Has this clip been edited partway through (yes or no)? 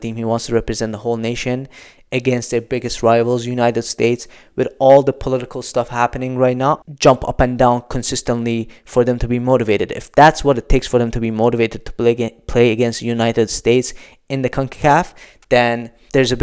yes